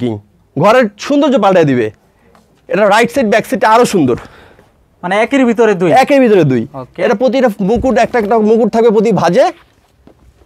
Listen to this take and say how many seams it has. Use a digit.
0